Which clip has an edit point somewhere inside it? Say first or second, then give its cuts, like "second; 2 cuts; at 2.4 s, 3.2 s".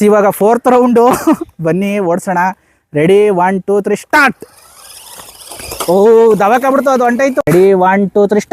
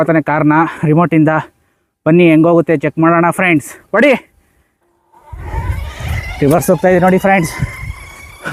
first; 1 cut; at 7.4 s